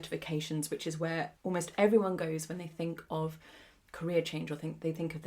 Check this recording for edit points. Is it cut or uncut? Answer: cut